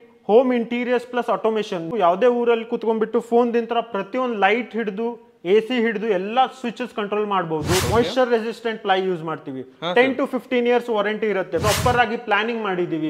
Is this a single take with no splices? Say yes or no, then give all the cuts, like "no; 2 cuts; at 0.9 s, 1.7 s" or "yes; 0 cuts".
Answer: no; 3 cuts; at 1.9 s, 7.8 s, 11.6 s